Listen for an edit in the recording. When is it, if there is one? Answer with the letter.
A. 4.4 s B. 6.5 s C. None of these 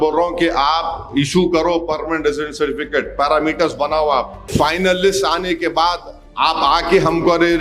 A